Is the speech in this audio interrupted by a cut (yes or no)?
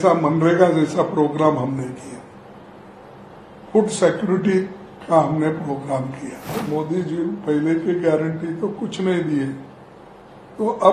yes